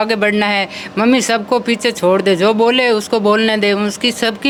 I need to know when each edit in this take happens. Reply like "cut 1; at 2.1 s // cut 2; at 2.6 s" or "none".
none